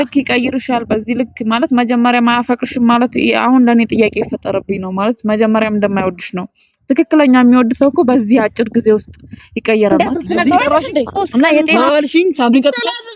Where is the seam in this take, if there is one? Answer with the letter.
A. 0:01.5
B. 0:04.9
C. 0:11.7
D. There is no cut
C